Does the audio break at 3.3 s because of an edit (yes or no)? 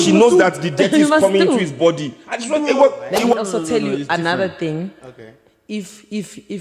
yes